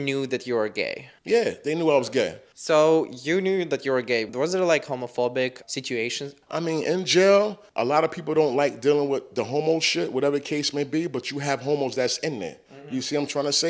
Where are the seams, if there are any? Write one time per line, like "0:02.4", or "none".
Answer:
none